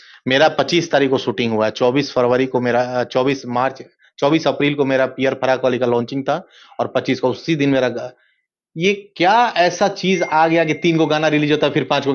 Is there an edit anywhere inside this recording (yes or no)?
no